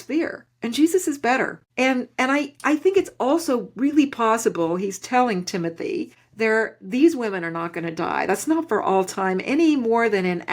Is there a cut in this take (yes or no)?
yes